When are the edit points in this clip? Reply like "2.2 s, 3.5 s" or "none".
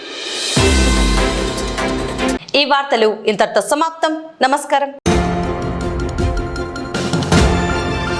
none